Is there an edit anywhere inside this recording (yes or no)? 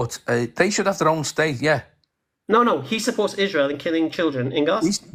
no